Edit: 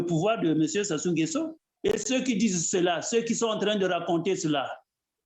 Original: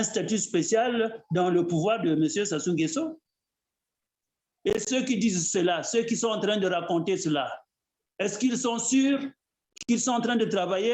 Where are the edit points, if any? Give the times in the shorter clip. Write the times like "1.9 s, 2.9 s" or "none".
1.6 s